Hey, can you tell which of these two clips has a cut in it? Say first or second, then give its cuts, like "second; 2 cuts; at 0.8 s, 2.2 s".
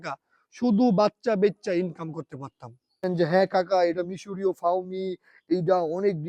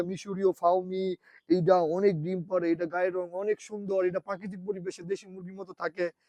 first; 1 cut; at 3.0 s